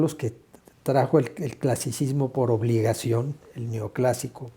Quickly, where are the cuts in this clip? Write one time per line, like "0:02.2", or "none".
none